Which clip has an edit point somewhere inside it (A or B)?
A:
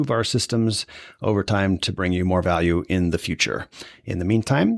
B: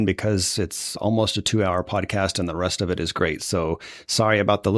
B